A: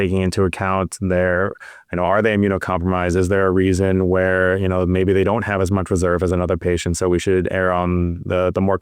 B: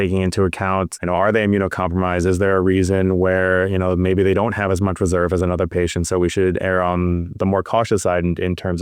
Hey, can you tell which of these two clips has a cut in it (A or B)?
B